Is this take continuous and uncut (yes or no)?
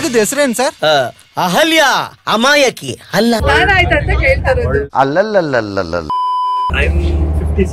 no